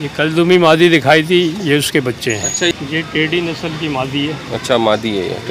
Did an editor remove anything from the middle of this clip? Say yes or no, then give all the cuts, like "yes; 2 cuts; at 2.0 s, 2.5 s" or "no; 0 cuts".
yes; 1 cut; at 2.8 s